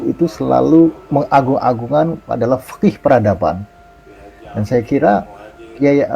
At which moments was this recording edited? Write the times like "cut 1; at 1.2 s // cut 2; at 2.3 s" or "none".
cut 1; at 1.0 s